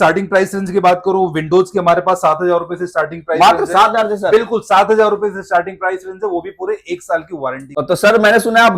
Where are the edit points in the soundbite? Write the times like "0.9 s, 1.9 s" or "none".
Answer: 7.6 s